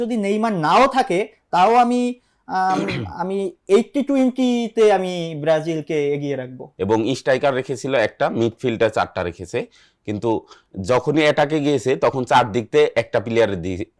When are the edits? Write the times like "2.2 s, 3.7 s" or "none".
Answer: 6.6 s